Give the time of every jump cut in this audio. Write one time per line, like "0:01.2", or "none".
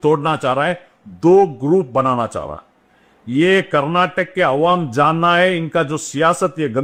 none